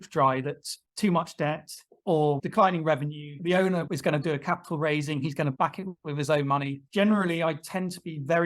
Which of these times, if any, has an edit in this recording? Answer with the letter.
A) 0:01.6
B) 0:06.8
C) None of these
B